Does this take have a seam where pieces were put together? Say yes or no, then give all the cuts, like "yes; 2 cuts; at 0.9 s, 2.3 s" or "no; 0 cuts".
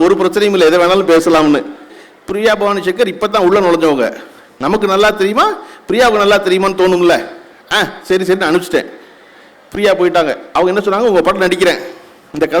yes; 1 cut; at 1.9 s